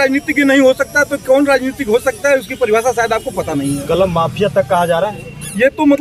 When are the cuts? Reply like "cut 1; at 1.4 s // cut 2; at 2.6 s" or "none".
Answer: none

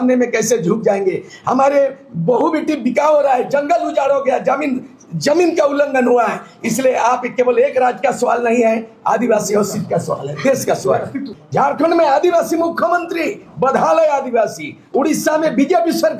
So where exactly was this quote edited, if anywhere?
cut 1; at 11.3 s

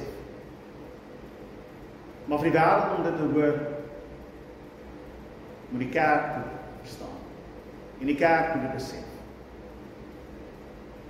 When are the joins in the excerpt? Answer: none

